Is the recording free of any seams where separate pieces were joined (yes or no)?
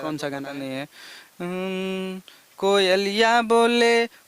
yes